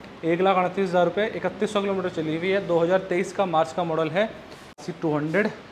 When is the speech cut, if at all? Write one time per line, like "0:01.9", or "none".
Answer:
0:04.8